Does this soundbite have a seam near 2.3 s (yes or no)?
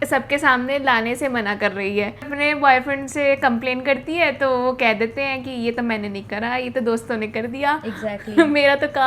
yes